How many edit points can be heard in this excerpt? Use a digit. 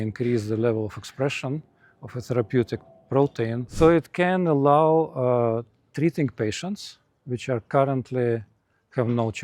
1